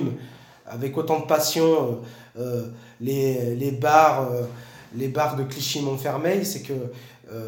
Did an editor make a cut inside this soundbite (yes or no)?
no